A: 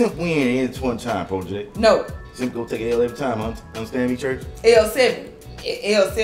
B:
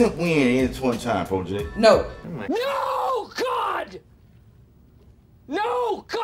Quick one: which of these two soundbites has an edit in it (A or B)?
A